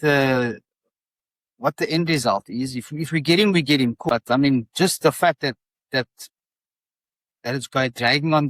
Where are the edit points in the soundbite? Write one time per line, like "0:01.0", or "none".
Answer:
0:04.0